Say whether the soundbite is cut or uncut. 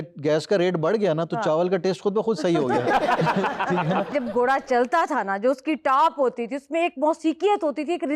cut